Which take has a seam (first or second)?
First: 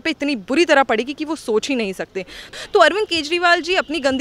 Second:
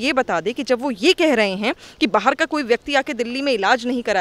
first